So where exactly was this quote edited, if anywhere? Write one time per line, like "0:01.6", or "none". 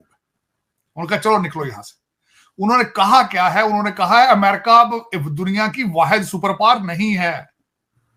none